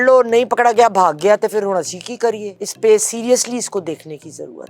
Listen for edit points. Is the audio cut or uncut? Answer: cut